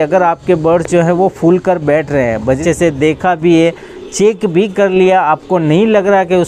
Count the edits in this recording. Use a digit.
1